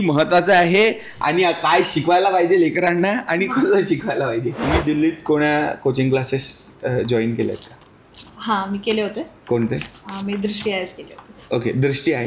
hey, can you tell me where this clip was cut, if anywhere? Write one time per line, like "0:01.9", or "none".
0:04.5